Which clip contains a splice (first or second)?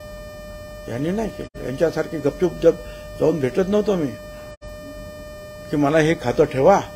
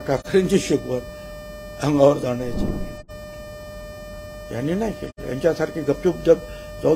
second